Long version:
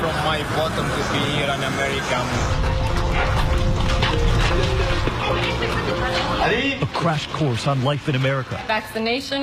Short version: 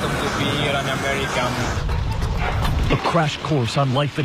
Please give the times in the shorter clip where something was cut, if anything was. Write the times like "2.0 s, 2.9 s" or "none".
2.9 s